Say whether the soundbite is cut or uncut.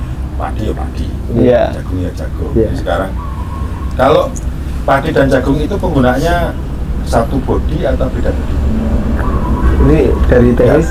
uncut